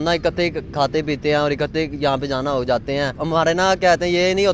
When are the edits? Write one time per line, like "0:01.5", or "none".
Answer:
0:03.2